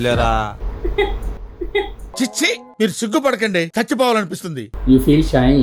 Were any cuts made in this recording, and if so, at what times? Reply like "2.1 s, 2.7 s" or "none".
none